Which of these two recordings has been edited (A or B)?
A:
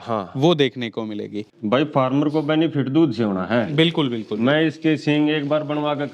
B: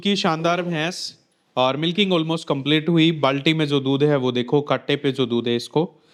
A